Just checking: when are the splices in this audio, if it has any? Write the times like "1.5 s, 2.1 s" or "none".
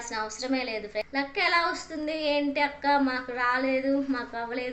1.0 s